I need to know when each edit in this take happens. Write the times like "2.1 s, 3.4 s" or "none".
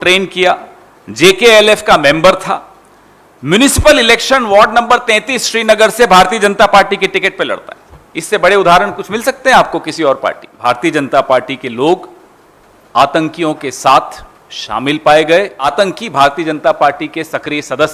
10.6 s, 15.6 s